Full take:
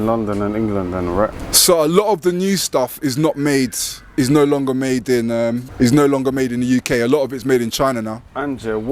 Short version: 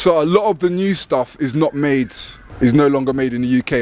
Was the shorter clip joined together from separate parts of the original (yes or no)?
yes